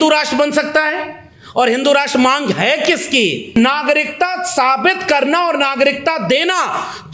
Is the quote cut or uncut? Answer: cut